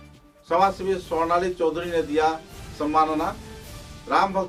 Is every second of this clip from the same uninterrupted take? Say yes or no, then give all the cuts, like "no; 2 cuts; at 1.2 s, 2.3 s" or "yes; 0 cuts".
yes; 0 cuts